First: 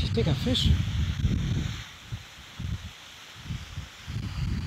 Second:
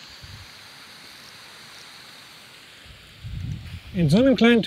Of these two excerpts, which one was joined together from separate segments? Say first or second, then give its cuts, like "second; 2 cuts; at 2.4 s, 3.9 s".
second; 1 cut; at 3.6 s